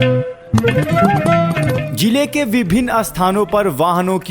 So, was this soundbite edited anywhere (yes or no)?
yes